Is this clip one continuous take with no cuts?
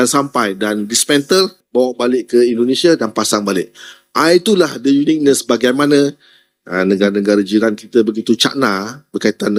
yes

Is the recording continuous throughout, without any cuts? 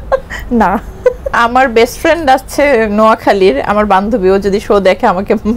no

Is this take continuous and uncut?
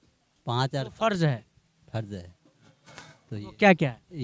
yes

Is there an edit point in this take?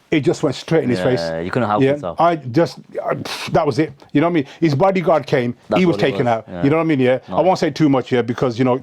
yes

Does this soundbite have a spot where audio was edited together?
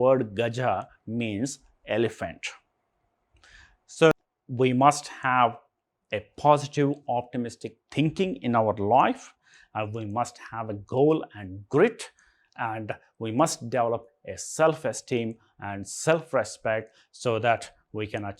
yes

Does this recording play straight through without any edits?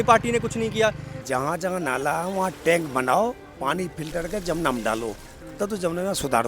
no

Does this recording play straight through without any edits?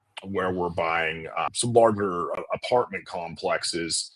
no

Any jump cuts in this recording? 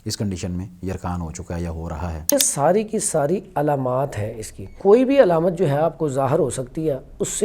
yes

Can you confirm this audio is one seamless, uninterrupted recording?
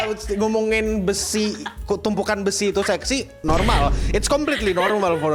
yes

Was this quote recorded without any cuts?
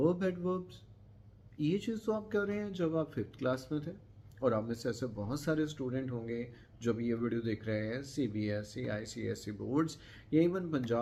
yes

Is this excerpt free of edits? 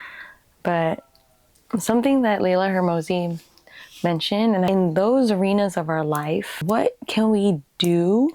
no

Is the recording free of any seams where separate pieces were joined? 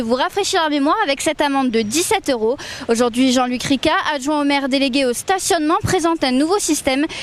no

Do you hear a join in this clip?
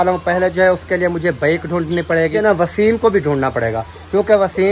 yes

